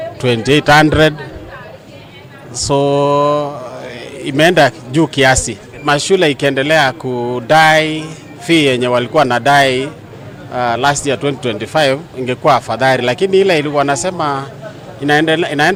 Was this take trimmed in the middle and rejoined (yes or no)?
no